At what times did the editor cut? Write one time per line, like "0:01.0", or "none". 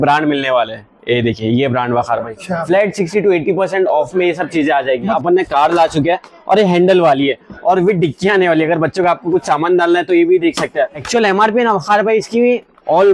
0:05.1
0:11.0